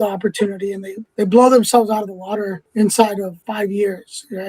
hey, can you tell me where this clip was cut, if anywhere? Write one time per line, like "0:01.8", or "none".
0:00.9
0:02.6
0:03.4